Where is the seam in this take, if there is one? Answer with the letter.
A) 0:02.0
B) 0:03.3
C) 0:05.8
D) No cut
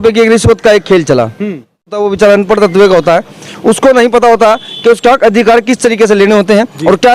A